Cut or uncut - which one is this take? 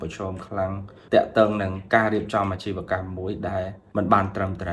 cut